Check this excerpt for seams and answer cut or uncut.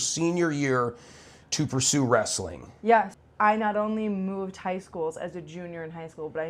cut